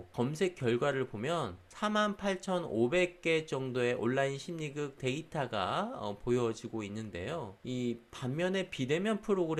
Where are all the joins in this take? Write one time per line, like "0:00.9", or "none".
none